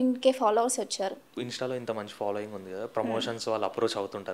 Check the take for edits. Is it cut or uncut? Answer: cut